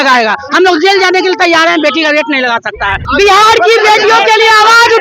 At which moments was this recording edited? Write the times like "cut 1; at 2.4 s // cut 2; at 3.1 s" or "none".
cut 1; at 3.0 s